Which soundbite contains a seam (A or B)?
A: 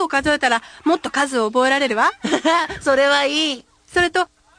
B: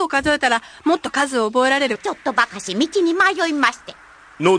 A